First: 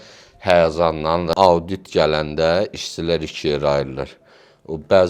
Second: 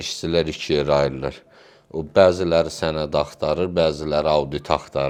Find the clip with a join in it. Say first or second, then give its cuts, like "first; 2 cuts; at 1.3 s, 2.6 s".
first; 1 cut; at 1.3 s